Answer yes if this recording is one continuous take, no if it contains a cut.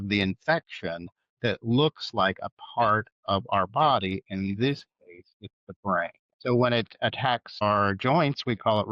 no